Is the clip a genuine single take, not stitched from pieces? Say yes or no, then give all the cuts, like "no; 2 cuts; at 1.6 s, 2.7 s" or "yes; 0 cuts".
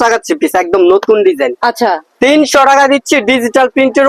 no; 1 cut; at 2.1 s